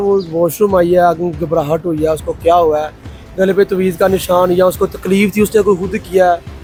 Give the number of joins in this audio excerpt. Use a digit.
0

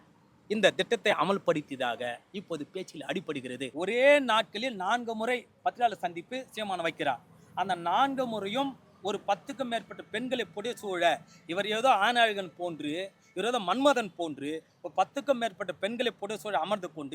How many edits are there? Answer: 1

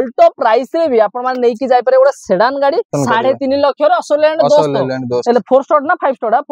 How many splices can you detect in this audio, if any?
1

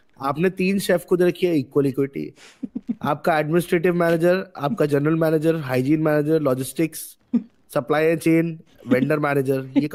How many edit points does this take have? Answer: 0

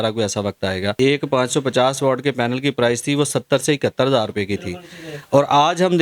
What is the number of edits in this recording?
1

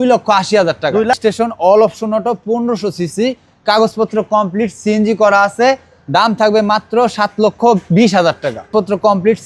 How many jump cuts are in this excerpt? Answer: 2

